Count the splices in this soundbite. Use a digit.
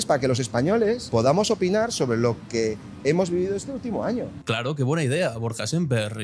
1